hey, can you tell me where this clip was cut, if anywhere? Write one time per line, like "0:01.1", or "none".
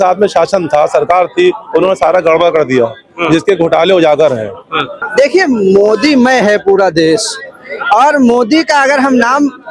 0:05.0